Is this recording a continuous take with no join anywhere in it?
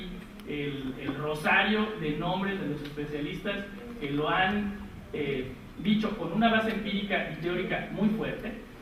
no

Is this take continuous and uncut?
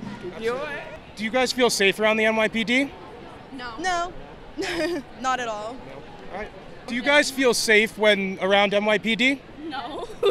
no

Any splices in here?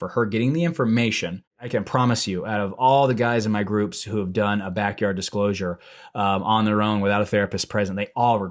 yes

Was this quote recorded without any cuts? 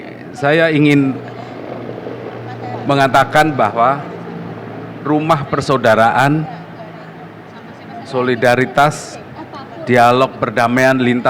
yes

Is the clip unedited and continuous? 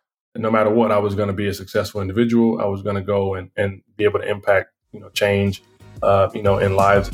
yes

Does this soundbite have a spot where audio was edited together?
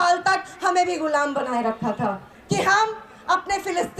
yes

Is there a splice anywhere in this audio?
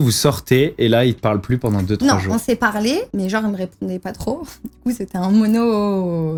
no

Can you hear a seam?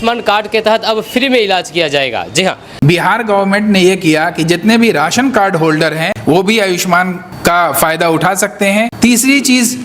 yes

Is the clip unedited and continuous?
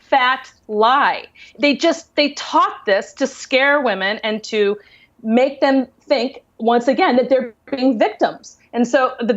yes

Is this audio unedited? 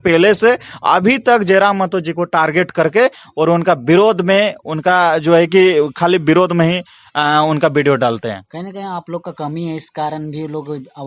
yes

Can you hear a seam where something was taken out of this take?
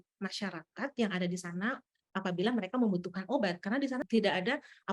yes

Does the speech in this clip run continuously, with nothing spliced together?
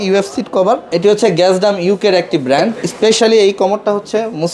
no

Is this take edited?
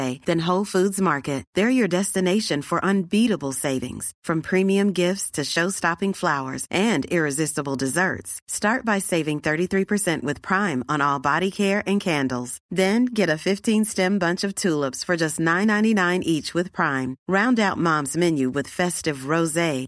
no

